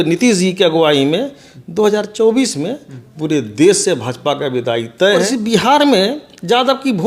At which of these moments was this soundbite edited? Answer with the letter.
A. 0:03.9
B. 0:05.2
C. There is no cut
B